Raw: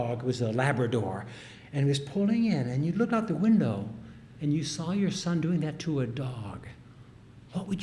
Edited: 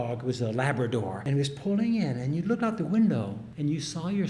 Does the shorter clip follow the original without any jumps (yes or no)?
no